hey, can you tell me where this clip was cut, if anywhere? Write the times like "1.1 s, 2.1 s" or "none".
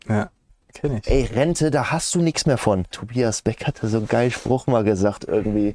3.0 s